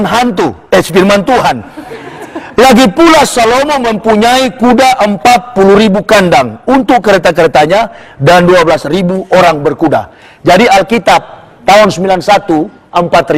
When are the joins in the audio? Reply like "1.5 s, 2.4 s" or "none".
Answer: none